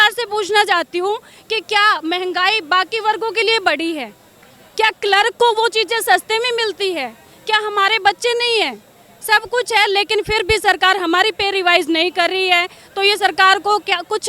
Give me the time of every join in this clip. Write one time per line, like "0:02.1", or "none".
none

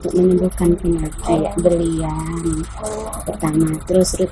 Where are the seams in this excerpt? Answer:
0:01.3

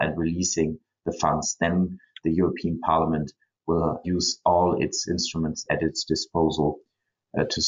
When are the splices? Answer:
0:04.0
0:05.6

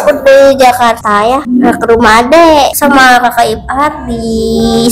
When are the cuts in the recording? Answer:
0:01.1
0:02.8

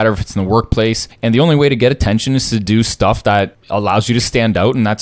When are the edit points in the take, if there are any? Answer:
0:01.1
0:03.6

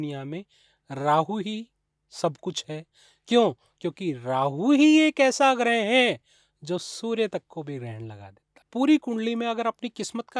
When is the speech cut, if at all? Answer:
0:08.5

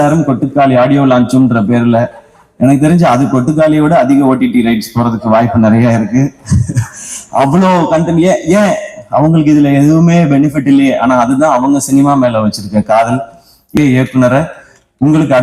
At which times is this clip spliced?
0:13.8

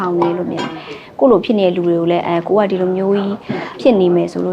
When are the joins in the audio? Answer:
0:01.0
0:03.7

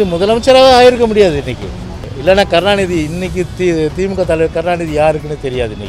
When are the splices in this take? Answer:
0:02.1

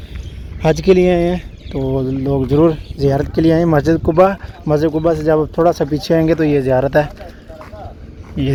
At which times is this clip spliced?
none

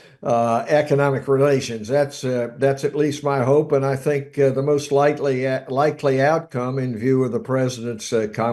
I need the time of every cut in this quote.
none

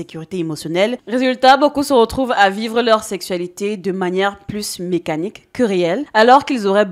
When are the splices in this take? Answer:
0:01.0

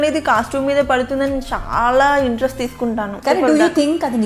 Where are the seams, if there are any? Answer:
0:03.1

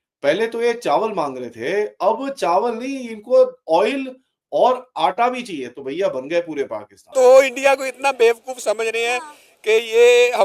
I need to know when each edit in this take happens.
0:07.0

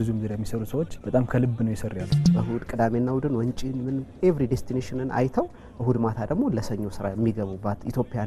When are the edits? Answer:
0:01.0
0:02.3

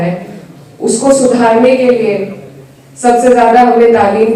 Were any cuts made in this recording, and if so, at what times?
none

